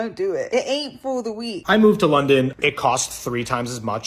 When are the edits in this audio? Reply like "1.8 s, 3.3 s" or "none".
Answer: 1.6 s, 2.5 s